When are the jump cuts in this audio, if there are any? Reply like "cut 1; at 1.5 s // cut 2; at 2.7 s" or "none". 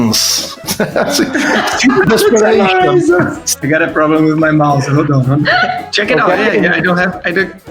cut 1; at 3.5 s // cut 2; at 5.8 s